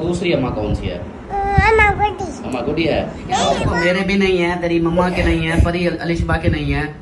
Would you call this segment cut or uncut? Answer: cut